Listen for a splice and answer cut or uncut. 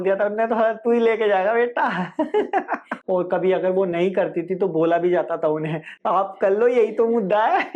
cut